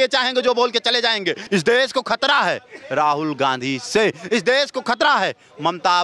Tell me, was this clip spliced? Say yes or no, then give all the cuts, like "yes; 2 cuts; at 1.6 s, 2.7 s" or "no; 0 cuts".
yes; 1 cut; at 1.4 s